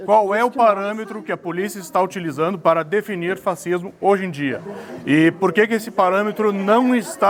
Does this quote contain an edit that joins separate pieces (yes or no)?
no